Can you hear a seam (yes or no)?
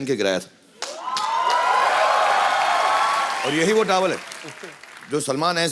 yes